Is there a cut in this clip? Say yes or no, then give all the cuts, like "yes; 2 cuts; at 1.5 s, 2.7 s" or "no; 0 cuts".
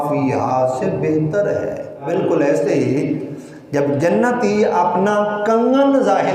yes; 1 cut; at 2.1 s